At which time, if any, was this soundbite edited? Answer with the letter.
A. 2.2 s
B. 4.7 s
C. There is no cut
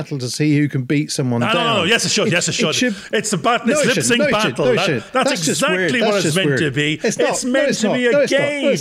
C